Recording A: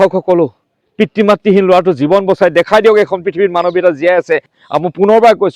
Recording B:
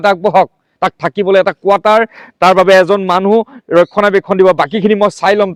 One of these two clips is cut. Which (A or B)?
A